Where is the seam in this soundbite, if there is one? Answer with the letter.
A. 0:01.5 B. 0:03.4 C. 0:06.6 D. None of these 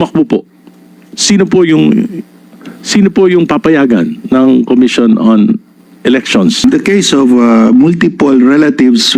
C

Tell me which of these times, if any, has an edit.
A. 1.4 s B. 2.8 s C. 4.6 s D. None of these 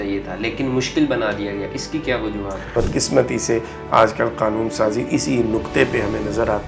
B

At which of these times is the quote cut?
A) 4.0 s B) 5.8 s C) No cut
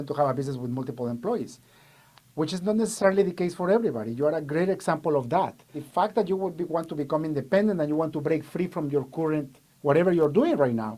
B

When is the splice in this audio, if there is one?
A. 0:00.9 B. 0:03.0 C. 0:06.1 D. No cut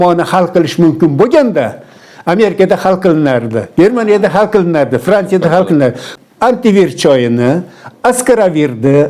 C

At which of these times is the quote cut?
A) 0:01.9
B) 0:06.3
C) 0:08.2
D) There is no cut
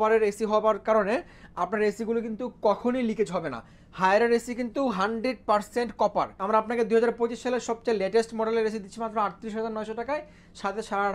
B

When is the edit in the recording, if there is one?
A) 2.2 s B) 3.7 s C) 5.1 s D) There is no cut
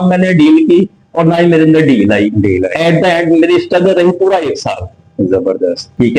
D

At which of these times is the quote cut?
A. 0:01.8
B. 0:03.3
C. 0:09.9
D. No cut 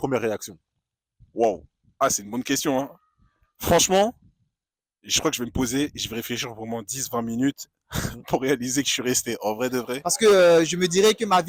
C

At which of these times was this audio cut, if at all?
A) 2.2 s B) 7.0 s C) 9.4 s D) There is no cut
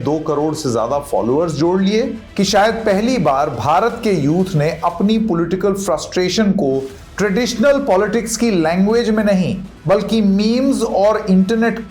A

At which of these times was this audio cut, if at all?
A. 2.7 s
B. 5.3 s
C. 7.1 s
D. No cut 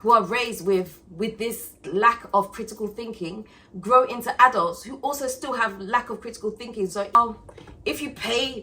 C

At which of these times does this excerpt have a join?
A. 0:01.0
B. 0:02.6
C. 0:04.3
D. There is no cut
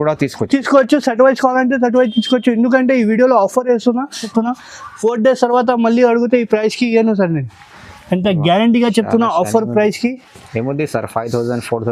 C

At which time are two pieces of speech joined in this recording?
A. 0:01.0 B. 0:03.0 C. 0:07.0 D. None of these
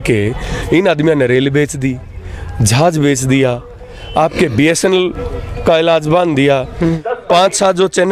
C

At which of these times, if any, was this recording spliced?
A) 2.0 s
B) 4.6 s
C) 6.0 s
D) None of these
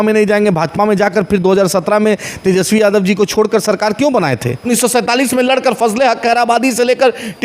B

